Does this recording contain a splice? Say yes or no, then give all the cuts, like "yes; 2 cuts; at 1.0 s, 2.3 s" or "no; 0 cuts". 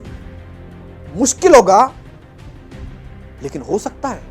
yes; 2 cuts; at 1.9 s, 3.4 s